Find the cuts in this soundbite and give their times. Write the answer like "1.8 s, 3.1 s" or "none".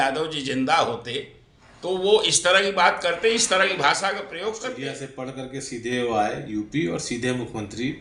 5.1 s